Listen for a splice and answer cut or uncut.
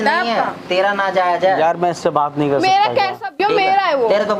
uncut